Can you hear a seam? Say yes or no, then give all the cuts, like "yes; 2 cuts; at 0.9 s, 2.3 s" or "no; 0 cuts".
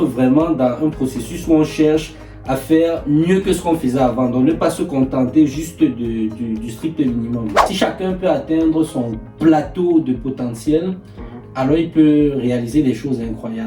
yes; 1 cut; at 7.6 s